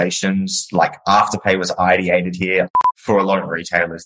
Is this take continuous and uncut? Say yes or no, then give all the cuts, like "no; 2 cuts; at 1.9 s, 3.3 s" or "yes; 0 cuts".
no; 1 cut; at 2.7 s